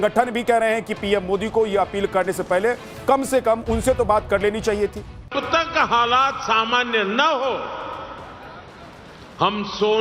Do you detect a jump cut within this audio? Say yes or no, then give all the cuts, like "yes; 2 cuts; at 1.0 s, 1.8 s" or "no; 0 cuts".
yes; 1 cut; at 5.3 s